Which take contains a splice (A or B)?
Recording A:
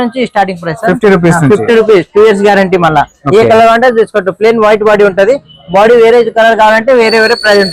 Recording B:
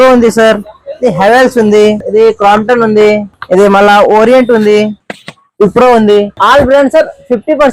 B